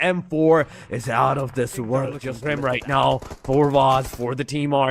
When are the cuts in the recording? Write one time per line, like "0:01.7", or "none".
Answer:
0:02.3